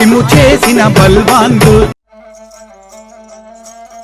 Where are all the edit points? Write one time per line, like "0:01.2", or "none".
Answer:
0:02.1